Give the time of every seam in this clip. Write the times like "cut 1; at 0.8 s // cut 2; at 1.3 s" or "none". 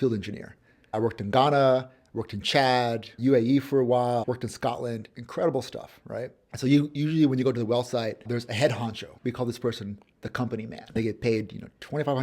cut 1; at 0.9 s // cut 2; at 3.1 s // cut 3; at 4.2 s // cut 4; at 6.4 s // cut 5; at 8.2 s // cut 6; at 9.1 s // cut 7; at 11.0 s